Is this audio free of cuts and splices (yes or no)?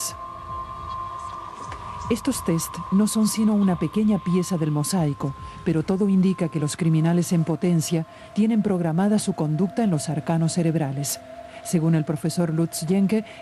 yes